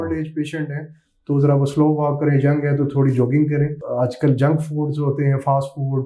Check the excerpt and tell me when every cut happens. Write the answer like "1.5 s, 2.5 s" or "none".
3.8 s